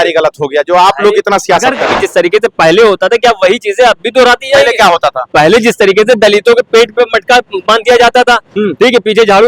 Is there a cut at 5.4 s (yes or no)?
no